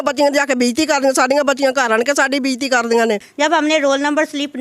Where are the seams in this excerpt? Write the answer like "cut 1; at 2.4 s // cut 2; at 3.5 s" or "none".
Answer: cut 1; at 3.3 s